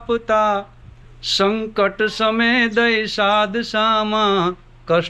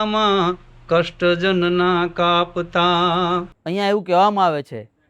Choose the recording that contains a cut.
second; 1 cut; at 3.5 s

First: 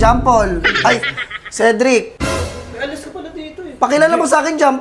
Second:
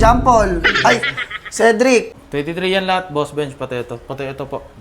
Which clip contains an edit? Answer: second; 1 cut; at 2.1 s

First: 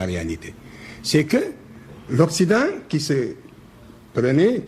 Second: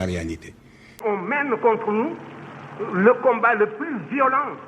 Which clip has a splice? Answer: second; 1 cut; at 1.0 s

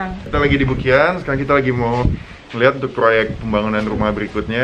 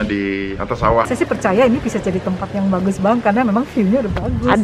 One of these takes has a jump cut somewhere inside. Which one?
second; 1 cut; at 1.1 s

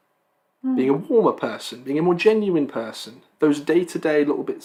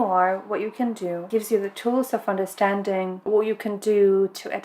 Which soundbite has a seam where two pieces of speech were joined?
second; 2 cuts; at 1.3 s, 3.2 s

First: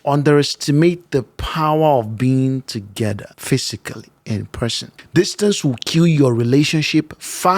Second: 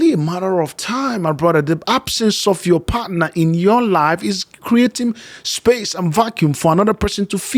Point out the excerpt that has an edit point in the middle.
first; 2 cuts; at 3.3 s, 4.9 s

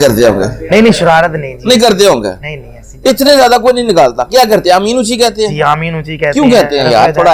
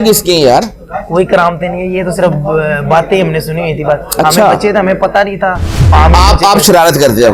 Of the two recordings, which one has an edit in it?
second; 1 cut; at 5.9 s

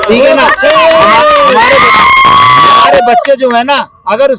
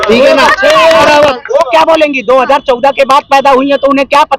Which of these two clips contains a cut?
second; 1 cut; at 1.0 s

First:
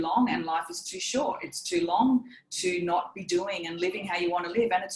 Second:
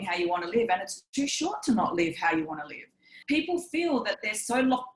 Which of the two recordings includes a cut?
second; 1 cut; at 3.1 s

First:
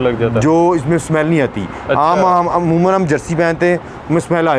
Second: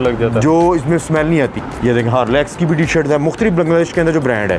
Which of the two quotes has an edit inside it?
second; 1 cut; at 1.6 s

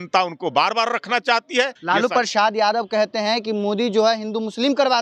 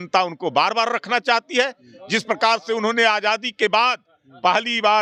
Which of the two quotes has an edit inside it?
first; 1 cut; at 1.8 s

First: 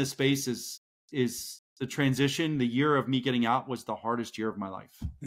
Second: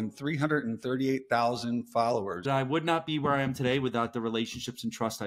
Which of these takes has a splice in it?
second; 1 cut; at 2.5 s

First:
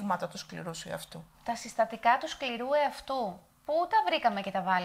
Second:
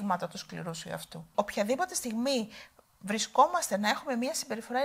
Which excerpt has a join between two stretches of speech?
second; 1 cut; at 1.3 s

